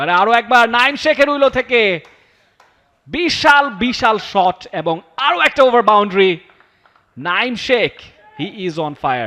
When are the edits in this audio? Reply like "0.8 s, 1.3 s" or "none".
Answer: none